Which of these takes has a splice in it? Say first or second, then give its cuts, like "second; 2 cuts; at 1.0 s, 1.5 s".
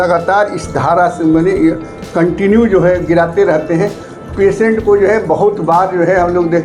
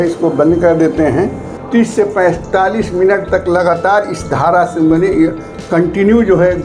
second; 1 cut; at 1.5 s